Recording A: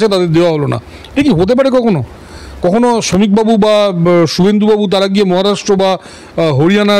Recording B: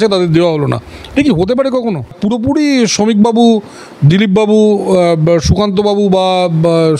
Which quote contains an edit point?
B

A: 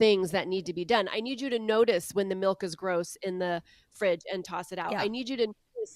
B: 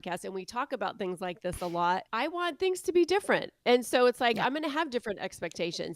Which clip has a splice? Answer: B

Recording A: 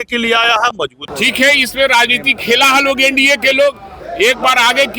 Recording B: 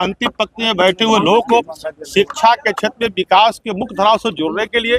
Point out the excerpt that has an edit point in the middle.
A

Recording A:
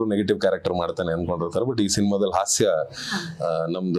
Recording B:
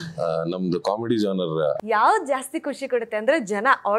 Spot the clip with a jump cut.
B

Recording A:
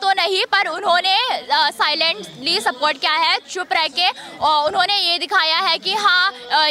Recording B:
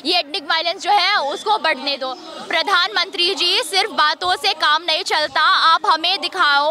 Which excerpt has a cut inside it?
B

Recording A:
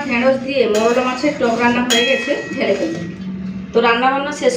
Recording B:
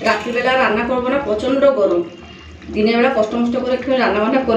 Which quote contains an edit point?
A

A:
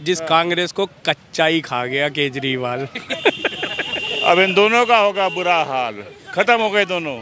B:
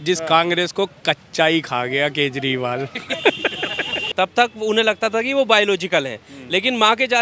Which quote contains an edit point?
B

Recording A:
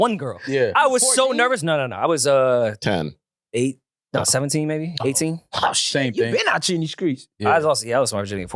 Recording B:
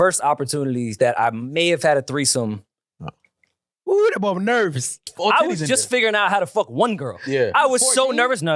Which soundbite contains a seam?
B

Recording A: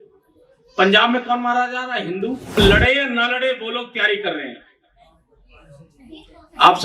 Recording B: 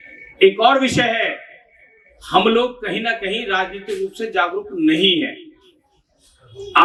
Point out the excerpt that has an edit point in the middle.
A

